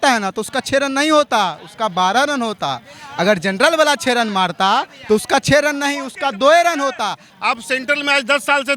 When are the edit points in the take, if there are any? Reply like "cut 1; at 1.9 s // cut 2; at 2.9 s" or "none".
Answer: cut 1; at 7.3 s

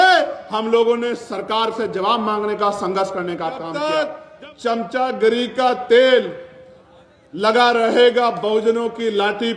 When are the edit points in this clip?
cut 1; at 3.7 s

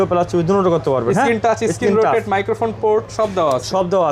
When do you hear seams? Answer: none

